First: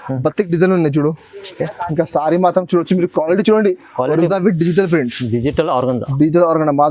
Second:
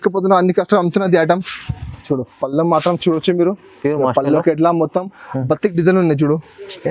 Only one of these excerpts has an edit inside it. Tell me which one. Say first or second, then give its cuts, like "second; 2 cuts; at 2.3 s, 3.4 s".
first; 1 cut; at 4.3 s